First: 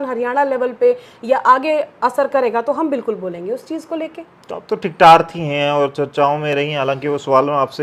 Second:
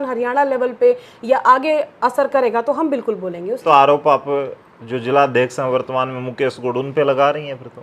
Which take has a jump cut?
second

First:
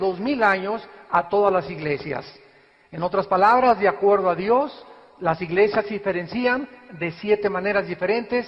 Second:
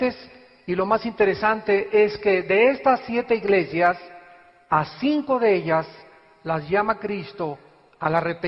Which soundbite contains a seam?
first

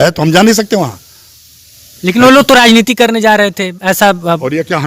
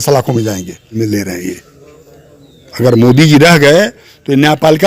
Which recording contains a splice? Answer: second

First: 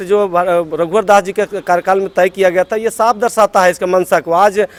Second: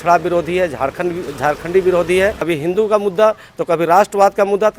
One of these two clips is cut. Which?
second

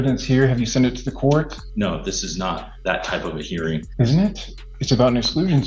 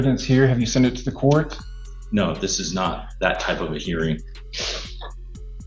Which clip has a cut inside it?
first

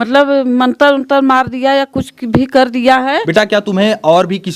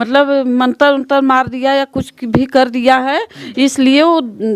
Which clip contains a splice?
first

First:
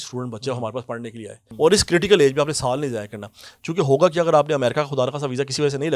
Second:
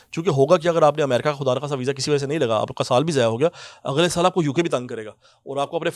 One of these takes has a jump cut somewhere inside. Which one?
first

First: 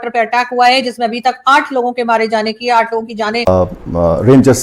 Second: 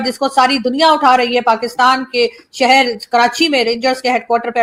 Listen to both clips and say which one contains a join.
first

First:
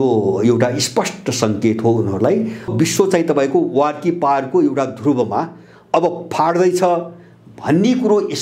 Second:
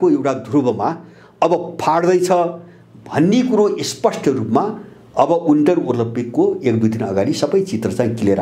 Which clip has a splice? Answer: first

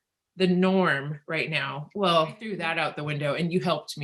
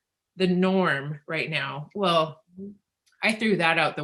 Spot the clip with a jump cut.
first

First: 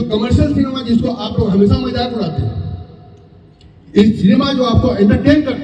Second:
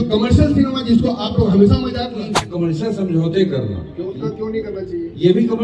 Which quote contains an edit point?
second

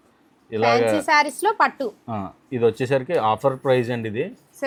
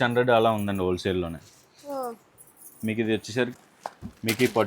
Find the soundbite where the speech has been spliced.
second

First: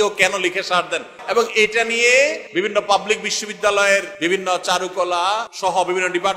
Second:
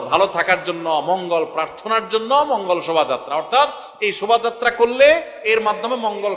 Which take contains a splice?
first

